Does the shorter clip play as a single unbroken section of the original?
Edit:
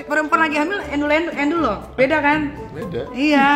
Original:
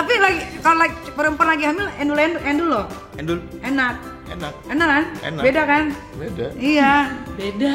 no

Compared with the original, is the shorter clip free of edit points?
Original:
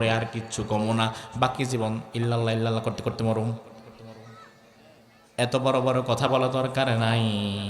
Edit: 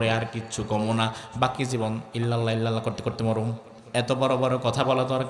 no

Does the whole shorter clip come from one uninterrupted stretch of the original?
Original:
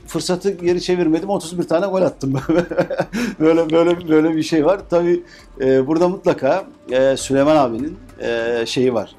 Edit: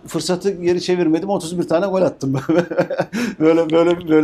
yes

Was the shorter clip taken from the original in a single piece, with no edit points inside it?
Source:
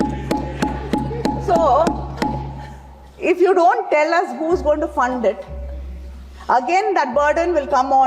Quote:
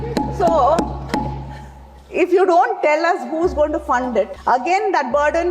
no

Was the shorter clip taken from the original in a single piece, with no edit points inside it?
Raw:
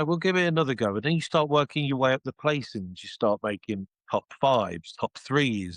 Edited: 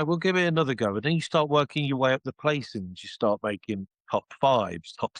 yes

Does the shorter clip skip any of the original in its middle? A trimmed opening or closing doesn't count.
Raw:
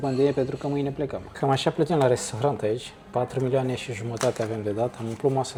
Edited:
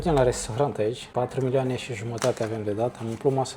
yes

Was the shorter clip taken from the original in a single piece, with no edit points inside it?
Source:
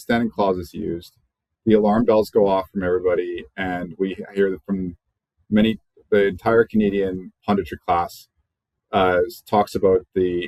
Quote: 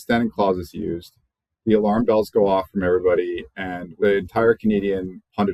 no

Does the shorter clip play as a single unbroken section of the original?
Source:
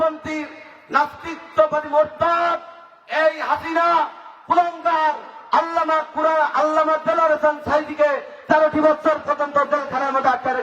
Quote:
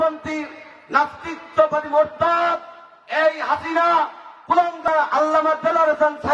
no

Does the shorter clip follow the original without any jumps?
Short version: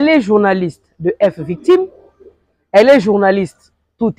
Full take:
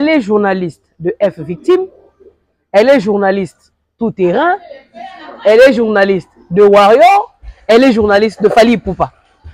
yes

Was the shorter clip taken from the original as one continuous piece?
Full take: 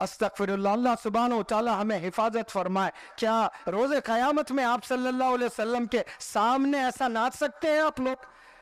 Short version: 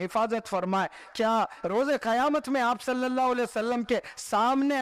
yes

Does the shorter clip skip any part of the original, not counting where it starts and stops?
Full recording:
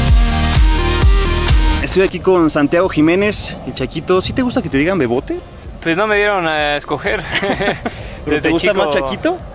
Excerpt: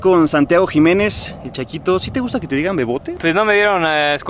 yes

